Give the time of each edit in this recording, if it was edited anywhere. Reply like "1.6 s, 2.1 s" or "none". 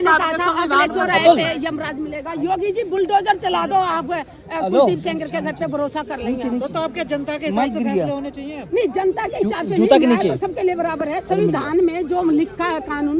none

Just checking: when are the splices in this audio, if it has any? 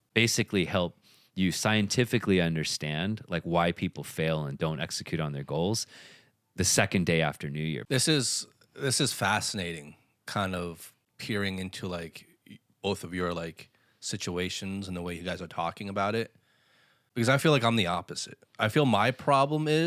7.8 s

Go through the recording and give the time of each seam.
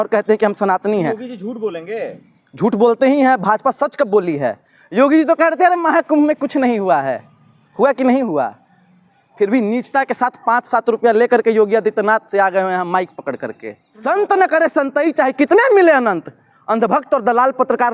13.9 s

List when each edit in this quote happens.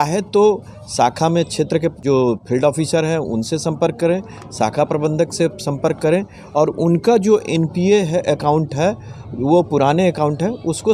2.0 s

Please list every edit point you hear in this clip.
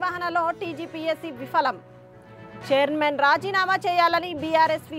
none

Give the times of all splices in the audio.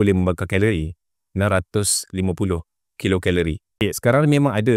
3.8 s

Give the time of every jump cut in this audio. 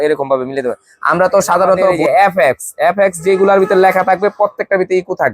2.0 s

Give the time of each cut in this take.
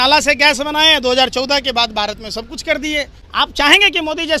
3.2 s

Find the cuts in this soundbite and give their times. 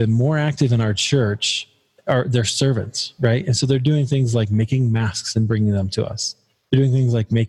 2.0 s

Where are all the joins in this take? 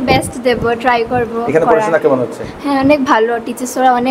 none

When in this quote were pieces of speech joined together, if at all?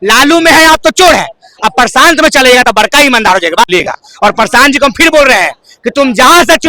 3.7 s

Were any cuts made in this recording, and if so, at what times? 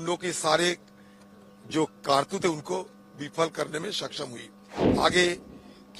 4.8 s

